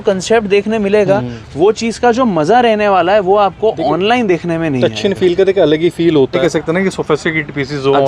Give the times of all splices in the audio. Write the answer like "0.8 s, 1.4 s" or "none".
6.4 s